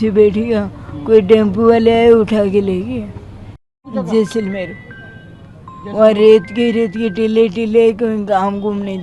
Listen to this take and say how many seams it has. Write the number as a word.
one